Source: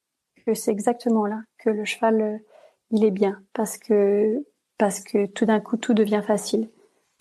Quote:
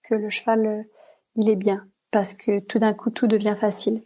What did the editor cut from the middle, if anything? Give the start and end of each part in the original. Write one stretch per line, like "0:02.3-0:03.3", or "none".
0:03.5-0:04.6